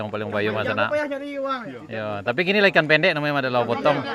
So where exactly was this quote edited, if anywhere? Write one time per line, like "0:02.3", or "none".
none